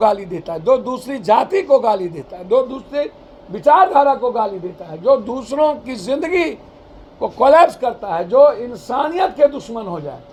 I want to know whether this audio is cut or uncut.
uncut